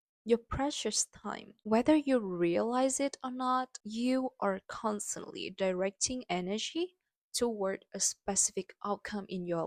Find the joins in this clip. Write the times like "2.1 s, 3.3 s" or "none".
none